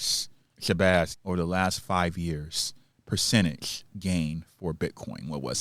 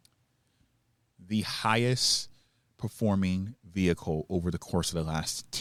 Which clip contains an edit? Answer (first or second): first